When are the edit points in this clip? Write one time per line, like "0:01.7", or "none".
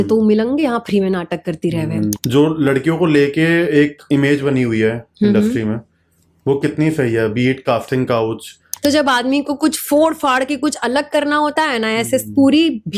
0:02.2
0:08.6